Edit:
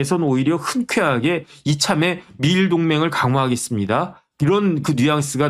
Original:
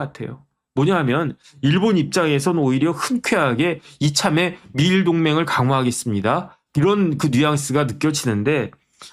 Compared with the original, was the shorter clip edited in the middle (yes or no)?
no